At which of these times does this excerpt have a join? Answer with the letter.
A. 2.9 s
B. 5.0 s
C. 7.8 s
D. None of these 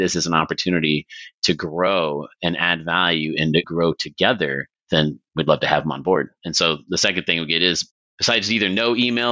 B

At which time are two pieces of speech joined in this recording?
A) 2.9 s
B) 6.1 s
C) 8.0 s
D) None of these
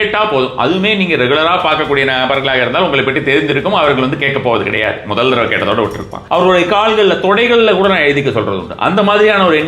B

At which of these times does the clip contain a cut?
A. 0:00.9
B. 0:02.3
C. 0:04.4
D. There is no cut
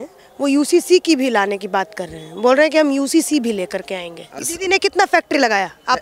C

